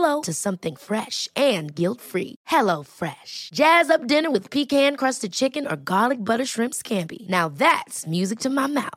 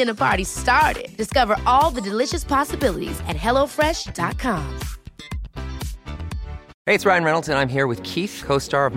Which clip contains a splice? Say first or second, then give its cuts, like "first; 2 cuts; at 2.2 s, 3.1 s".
second; 1 cut; at 6.7 s